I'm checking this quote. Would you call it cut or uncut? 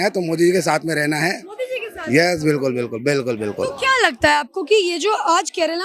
uncut